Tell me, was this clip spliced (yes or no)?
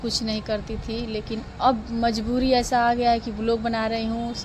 no